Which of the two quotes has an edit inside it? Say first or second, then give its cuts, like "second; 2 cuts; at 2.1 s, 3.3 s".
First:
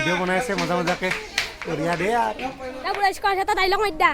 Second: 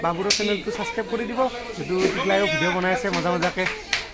first; 1 cut; at 2.8 s